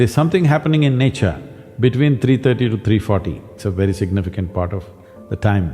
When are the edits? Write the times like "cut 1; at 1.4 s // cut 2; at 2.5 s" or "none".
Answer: cut 1; at 3.5 s